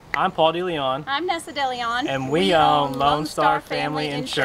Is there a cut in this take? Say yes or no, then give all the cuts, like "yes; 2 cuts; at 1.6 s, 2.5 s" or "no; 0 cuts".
no; 0 cuts